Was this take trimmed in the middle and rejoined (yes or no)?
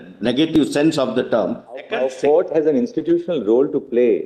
yes